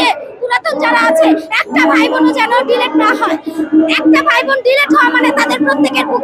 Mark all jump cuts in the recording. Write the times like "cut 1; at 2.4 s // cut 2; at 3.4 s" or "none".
none